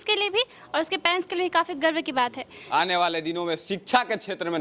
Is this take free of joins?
no; 1 cut; at 2.5 s

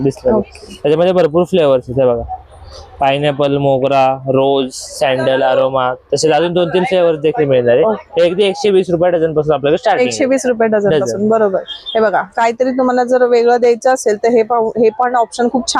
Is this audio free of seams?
yes; 0 cuts

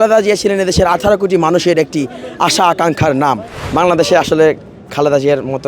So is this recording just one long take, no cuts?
no; 1 cut; at 3.6 s

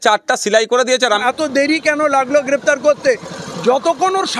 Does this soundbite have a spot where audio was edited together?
yes; 1 cut; at 1.2 s

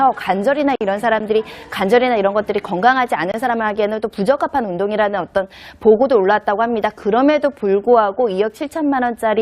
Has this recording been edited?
yes; 1 cut; at 4.7 s

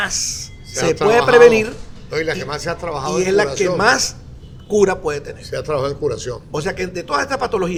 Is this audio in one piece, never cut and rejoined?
yes; 0 cuts

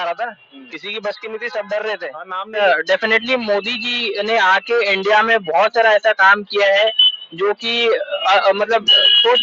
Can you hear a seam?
yes; 1 cut; at 2.6 s

